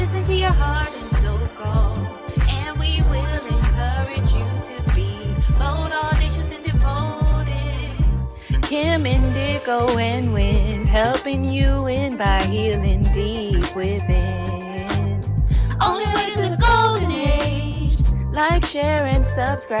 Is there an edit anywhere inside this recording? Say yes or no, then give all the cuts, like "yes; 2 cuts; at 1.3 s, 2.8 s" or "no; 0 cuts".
no; 0 cuts